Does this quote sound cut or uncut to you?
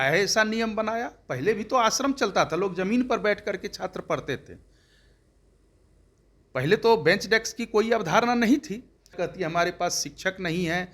cut